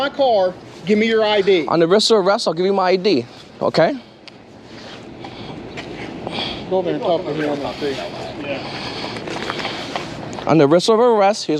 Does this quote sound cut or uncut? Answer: uncut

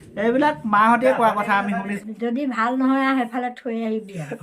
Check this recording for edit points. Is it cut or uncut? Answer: cut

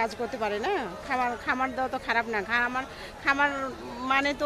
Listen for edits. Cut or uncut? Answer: uncut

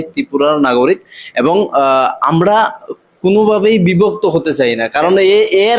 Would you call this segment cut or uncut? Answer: uncut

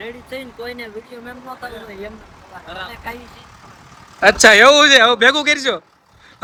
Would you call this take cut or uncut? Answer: uncut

